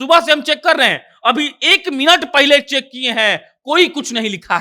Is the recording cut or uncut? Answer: uncut